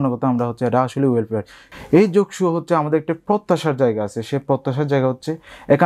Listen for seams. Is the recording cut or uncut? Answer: cut